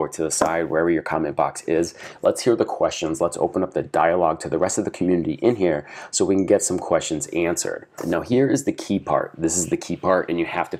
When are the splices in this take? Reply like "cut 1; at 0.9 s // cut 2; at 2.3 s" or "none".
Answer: cut 1; at 8.0 s